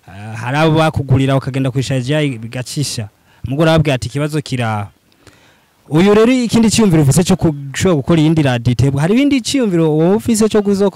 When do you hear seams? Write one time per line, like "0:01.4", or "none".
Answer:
none